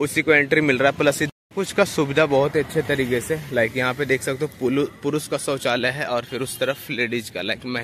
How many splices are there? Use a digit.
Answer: 1